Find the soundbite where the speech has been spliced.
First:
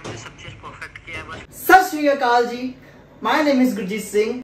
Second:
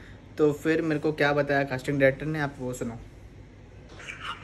first; 1 cut; at 1.7 s

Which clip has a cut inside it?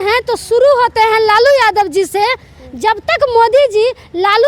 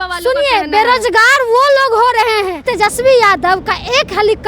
second; 1 cut; at 2.6 s

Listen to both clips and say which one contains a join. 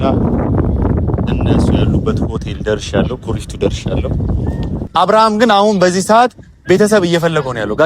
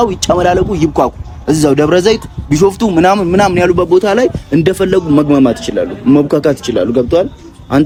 first; 1 cut; at 4.8 s

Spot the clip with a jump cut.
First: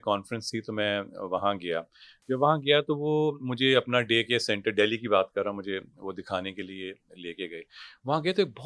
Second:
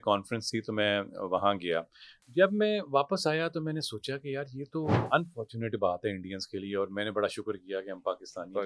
second; 2 cuts; at 2.2 s, 5.0 s

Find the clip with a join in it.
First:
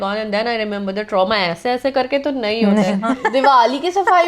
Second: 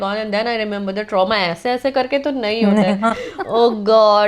first; 1 cut; at 3.1 s

